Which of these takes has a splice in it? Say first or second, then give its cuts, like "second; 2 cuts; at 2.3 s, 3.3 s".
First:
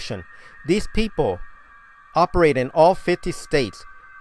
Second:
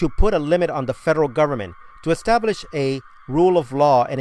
second; 1 cut; at 2.4 s